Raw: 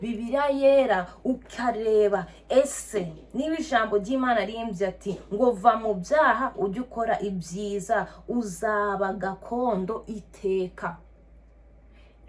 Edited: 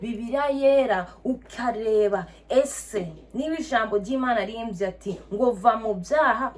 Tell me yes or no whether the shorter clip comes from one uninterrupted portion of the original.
yes